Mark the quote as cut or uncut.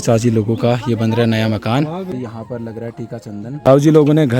cut